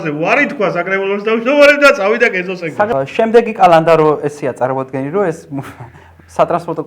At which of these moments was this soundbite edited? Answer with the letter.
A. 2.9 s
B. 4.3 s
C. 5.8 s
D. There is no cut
A